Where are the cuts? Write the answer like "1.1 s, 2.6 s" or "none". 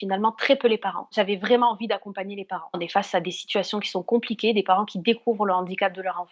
1.1 s, 2.8 s